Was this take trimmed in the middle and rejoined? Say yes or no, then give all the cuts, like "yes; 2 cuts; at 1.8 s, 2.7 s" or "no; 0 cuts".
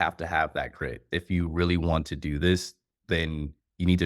yes; 1 cut; at 1.1 s